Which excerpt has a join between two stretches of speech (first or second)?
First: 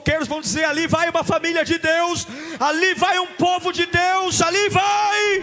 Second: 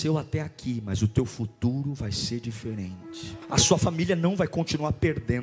second